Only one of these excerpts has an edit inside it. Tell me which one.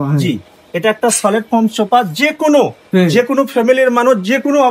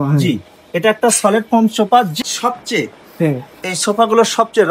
second; 1 cut; at 2.1 s

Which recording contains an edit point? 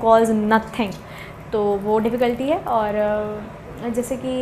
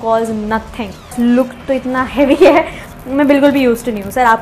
second; 1 cut; at 1.1 s

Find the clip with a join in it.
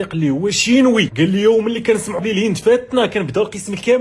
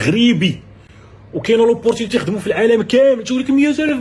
first; 2 cuts; at 1.1 s, 2.2 s

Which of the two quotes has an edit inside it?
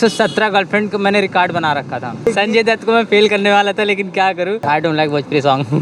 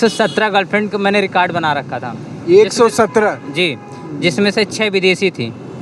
first; 2 cuts; at 2.3 s, 4.6 s

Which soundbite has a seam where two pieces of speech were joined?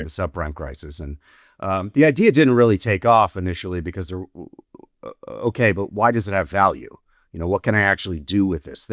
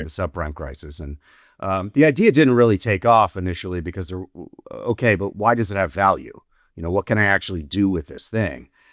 second; 1 cut; at 4.6 s

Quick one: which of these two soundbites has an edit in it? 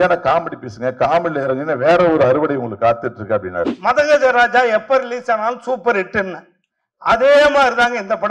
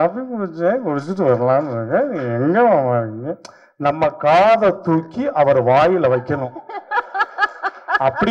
first; 1 cut; at 3.7 s

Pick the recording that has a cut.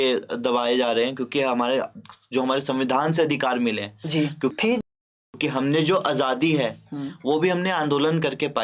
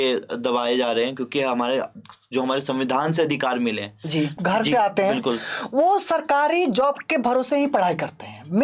second; 1 cut; at 4.3 s

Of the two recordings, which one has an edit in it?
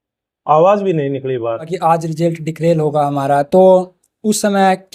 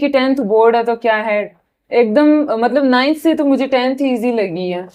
first; 1 cut; at 1.7 s

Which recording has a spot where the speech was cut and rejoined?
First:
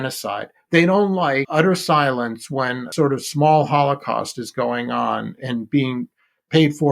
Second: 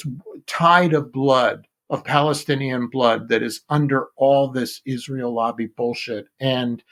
first; 3 cuts; at 1.5 s, 2.9 s, 5.4 s

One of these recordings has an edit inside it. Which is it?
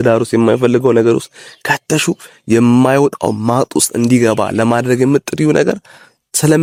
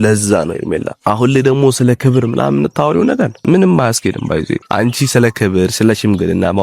second; 3 cuts; at 0.9 s, 3.4 s, 4.6 s

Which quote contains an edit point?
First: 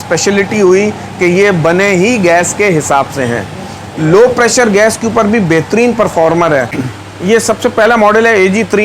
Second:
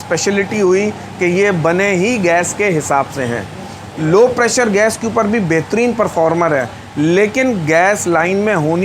first; 1 cut; at 6.8 s

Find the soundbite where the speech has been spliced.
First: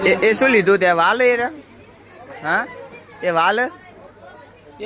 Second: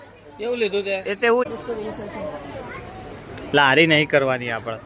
second; 1 cut; at 1.5 s

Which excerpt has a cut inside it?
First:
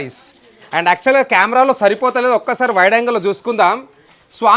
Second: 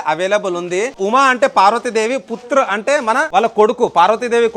second; 2 cuts; at 1.0 s, 3.3 s

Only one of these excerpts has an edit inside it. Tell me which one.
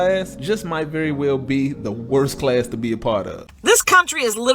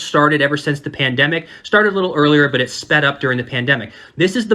first; 1 cut; at 3.4 s

